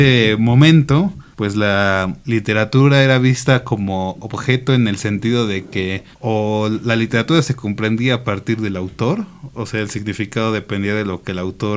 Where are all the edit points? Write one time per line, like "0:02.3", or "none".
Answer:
0:01.2
0:02.2